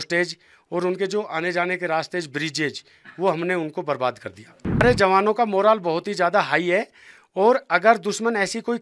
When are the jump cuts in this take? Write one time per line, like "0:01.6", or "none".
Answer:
0:04.8